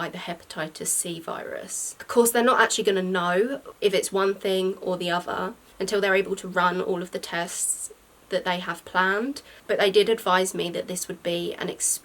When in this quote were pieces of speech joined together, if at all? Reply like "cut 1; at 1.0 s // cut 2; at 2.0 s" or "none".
cut 1; at 1.9 s // cut 2; at 9.5 s